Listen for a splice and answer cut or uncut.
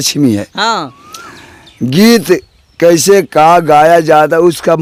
uncut